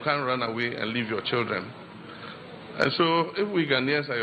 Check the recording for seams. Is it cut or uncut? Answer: uncut